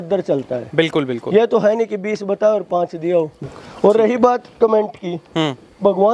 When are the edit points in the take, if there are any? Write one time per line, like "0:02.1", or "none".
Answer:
0:03.4

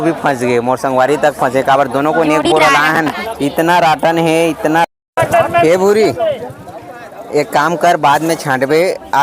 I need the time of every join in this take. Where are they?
0:04.9

